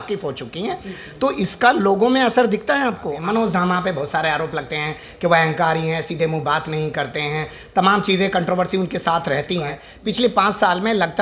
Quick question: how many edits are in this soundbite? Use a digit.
2